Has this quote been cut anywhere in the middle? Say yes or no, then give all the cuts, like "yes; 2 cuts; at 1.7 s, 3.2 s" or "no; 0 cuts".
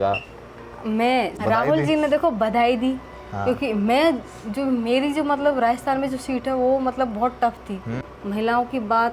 yes; 2 cuts; at 1.3 s, 8.0 s